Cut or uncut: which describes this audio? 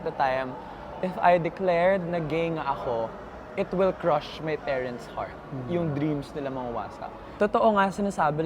cut